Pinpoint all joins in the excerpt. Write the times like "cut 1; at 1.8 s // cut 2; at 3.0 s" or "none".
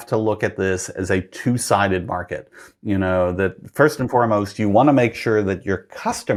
none